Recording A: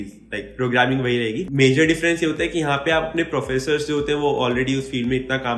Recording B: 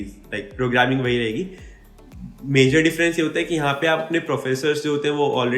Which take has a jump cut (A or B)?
A